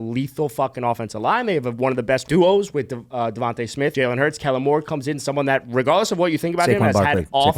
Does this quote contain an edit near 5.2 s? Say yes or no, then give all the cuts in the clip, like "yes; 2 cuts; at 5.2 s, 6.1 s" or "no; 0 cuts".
no; 2 cuts; at 2.2 s, 3.9 s